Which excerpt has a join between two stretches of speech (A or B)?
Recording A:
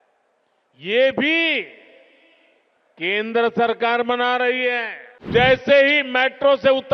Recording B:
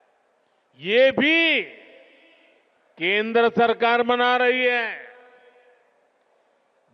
A